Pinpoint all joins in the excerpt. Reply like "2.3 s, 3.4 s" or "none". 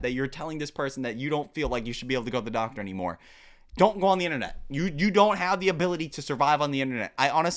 none